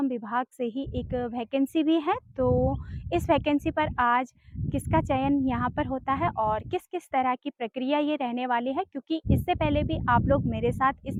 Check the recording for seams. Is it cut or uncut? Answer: uncut